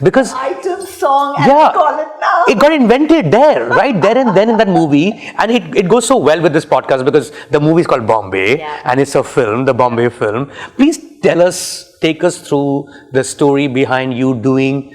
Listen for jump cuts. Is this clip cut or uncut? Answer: uncut